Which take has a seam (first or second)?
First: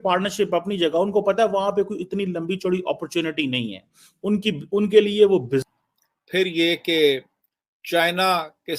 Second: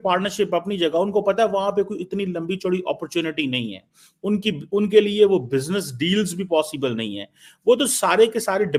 first